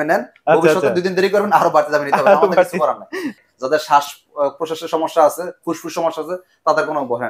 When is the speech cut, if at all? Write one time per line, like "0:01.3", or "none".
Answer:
0:03.4